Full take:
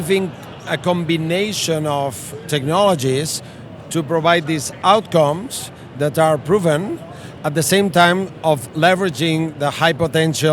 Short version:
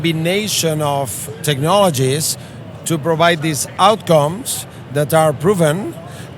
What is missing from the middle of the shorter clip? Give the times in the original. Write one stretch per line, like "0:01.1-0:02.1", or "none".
none